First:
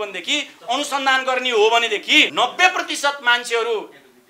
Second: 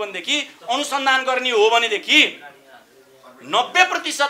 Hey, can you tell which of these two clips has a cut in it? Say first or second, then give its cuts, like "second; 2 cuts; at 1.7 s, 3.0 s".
first; 1 cut; at 2.3 s